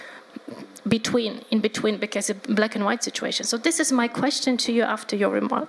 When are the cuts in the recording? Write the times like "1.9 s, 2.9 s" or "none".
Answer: none